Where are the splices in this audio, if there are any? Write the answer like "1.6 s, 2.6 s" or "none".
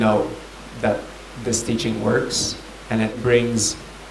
3.2 s

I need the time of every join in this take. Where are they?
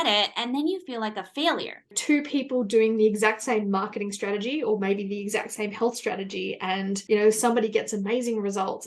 1.9 s

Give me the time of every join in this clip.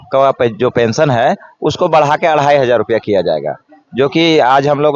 none

